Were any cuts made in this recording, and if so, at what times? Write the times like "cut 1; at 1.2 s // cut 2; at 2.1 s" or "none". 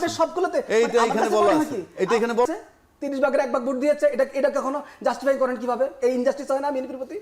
cut 1; at 2.5 s